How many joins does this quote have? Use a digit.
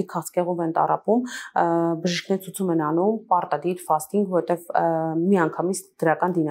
0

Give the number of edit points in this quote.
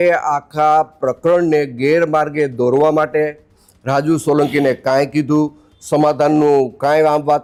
0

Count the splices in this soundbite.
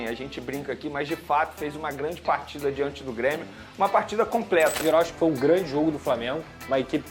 1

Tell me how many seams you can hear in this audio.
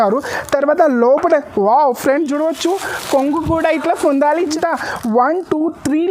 1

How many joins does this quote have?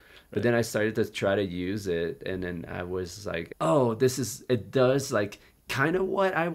1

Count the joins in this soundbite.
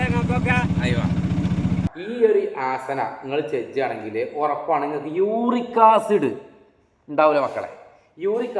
1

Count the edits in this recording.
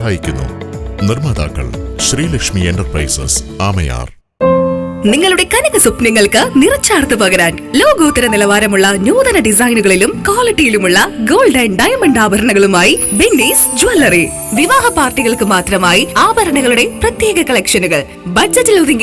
1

